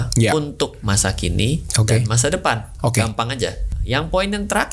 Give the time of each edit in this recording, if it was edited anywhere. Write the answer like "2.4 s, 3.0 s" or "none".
3.7 s